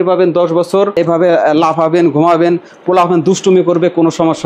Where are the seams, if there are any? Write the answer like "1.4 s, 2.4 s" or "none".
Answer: none